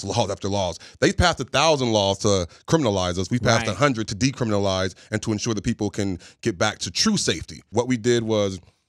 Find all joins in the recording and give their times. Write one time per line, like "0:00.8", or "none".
0:07.6